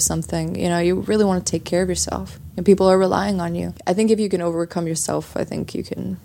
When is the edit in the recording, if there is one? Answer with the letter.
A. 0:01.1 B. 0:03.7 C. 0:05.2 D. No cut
B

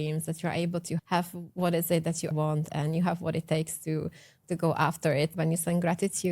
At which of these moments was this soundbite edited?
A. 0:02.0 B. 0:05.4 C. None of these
B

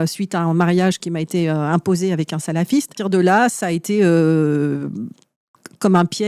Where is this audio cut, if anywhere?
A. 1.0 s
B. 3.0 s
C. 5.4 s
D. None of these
B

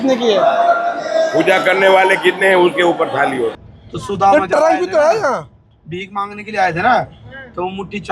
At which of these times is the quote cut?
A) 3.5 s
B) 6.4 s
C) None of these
A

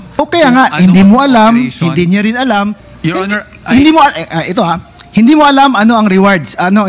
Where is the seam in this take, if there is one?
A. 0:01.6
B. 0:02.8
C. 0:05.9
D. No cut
B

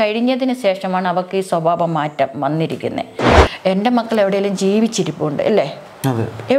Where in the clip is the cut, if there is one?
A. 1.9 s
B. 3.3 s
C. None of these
B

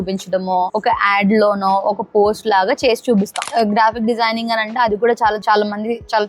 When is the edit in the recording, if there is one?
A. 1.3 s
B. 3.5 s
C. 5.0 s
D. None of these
B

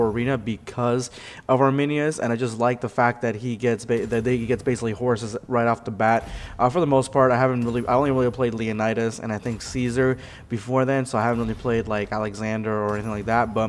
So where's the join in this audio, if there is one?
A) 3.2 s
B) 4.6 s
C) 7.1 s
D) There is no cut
A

